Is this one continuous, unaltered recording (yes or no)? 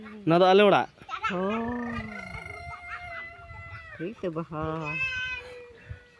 yes